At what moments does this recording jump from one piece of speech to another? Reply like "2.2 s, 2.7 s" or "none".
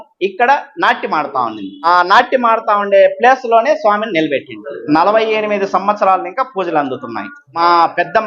4.6 s, 7.4 s